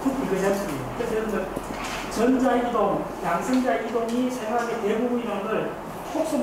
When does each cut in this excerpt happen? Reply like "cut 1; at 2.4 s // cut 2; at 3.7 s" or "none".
cut 1; at 3.4 s